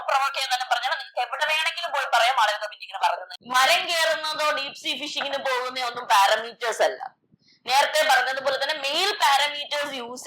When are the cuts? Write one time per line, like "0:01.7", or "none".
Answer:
0:03.3